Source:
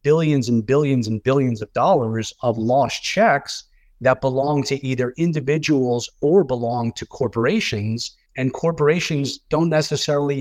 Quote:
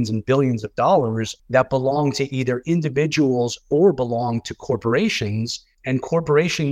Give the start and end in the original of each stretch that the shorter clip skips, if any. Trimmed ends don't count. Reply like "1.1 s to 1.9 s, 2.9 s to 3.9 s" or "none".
2.3 s to 3.8 s